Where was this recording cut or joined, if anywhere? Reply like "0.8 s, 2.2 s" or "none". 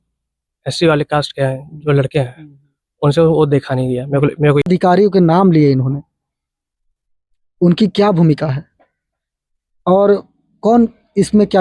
4.7 s